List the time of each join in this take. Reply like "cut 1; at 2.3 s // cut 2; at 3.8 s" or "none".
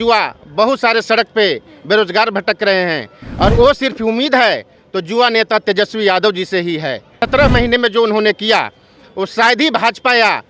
cut 1; at 7.1 s